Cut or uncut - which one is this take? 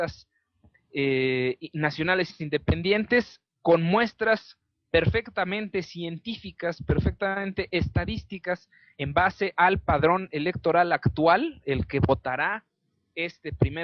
cut